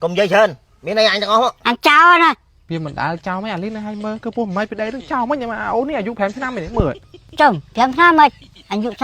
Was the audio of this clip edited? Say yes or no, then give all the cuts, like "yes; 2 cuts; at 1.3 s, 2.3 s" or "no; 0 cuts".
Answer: yes; 1 cut; at 2.5 s